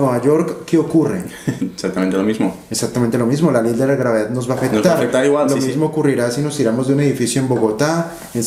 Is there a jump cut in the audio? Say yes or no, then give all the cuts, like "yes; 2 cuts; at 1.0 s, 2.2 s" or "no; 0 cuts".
no; 0 cuts